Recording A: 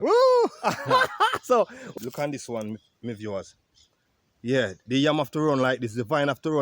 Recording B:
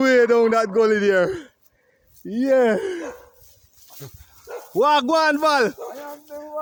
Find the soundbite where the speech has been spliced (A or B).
A